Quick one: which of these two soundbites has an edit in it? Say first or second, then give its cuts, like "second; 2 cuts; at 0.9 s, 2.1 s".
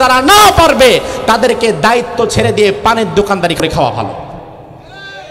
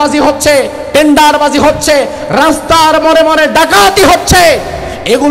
first; 1 cut; at 3.6 s